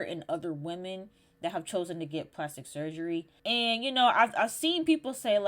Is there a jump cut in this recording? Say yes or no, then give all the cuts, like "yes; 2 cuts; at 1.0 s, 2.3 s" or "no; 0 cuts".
yes; 1 cut; at 3.3 s